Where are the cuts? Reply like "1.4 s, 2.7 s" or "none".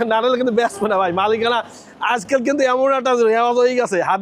none